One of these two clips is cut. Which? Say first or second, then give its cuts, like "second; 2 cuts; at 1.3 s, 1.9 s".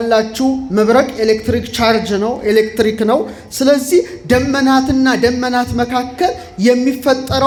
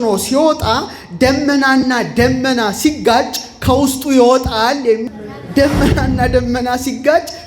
second; 1 cut; at 5.0 s